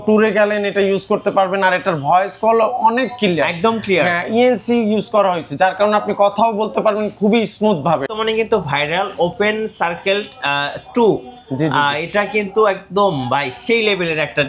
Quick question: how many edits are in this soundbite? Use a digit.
1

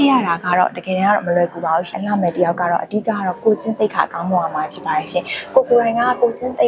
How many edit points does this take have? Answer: 1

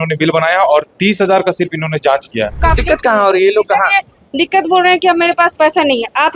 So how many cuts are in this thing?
1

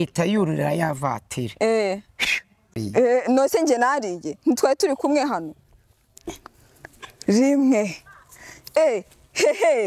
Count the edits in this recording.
1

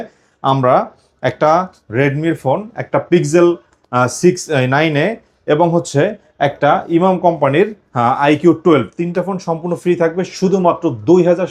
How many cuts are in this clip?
0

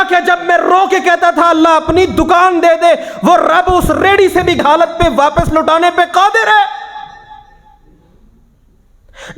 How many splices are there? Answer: 1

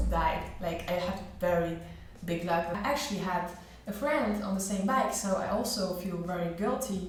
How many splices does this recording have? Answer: 0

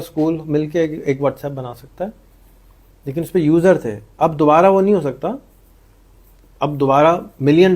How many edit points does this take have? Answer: 0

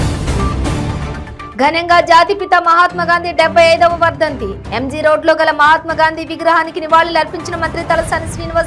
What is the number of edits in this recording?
1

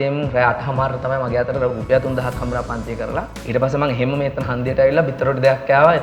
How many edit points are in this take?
1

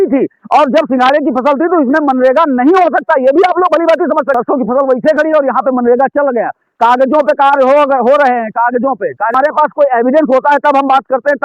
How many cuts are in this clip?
2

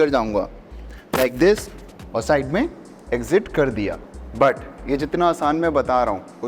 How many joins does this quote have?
0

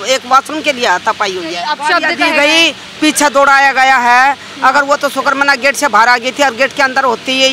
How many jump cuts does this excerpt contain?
1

